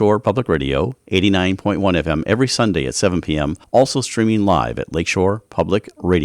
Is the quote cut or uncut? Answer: cut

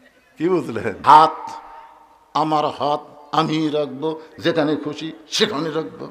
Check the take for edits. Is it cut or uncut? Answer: cut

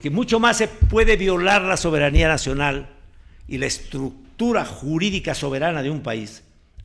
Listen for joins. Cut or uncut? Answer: uncut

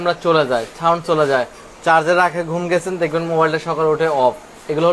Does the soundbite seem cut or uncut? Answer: uncut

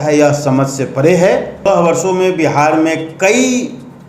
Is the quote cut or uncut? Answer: cut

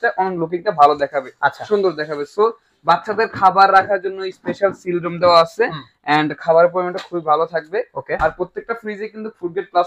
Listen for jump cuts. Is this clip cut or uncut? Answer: uncut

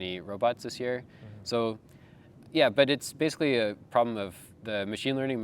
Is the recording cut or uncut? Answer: uncut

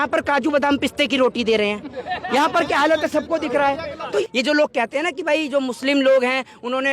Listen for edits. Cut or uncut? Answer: cut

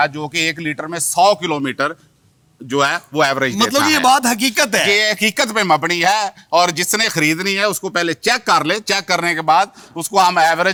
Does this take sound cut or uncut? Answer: uncut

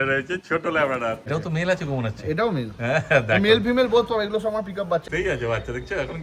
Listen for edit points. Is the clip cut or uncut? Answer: cut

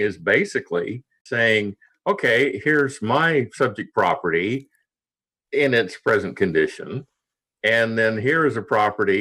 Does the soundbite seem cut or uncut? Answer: cut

